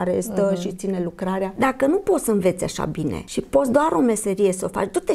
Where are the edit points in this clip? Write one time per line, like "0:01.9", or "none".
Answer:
0:01.5
0:03.2